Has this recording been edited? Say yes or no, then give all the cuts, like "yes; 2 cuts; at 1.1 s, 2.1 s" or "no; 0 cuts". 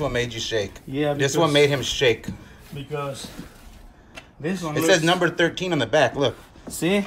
no; 0 cuts